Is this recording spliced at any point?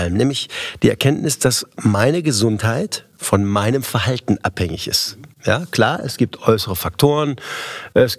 no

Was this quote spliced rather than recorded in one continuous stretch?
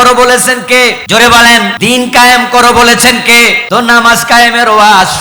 yes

